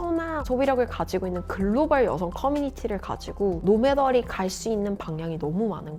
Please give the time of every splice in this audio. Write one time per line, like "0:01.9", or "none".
none